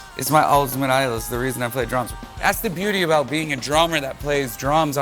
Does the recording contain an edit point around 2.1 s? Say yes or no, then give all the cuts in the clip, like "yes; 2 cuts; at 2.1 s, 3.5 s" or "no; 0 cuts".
yes; 1 cut; at 2.1 s